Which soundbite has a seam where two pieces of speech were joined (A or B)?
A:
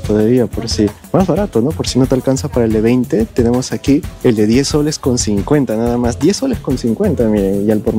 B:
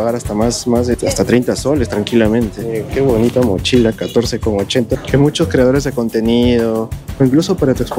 B